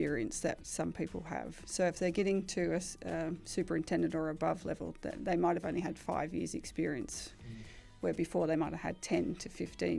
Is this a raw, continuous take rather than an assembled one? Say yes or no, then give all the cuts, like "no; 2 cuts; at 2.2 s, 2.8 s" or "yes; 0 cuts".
yes; 0 cuts